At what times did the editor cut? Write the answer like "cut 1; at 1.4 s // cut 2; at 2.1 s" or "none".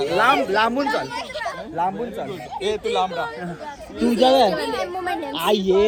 none